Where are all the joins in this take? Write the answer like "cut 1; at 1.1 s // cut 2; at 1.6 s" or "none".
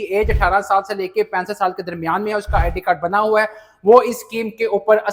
none